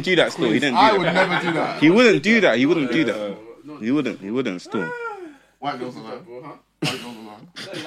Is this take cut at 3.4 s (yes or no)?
no